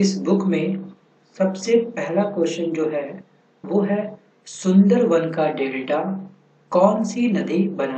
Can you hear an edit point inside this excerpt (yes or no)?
yes